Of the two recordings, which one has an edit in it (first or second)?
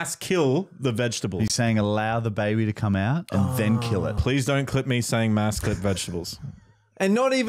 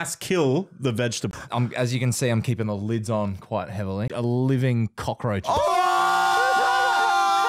second